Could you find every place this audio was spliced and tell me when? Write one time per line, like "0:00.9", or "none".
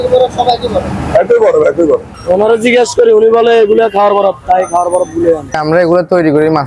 0:02.1
0:05.5